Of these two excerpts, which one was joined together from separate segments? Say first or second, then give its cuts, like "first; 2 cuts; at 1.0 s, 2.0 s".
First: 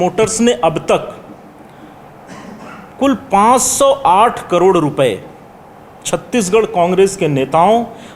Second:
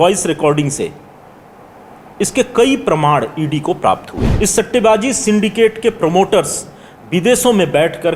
second; 1 cut; at 4.2 s